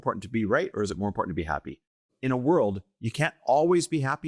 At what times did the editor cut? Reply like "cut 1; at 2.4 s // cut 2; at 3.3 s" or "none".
cut 1; at 2.0 s